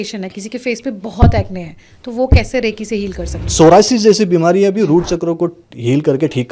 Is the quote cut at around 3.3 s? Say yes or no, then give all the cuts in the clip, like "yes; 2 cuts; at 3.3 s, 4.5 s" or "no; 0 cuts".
yes; 1 cut; at 3.3 s